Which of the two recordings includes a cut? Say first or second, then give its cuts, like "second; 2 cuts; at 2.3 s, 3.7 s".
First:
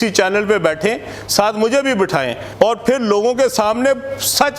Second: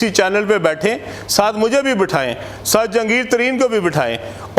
first; 1 cut; at 2.4 s